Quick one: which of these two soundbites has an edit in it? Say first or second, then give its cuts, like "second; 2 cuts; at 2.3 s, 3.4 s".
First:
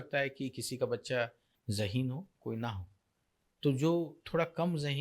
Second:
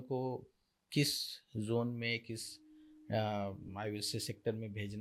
first; 1 cut; at 1.5 s